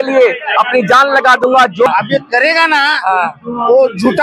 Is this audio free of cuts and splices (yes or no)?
no